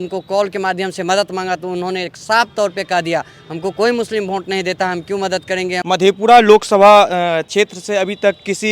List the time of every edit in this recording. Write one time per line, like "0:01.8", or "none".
0:05.8